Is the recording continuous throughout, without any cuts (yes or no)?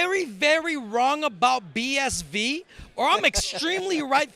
yes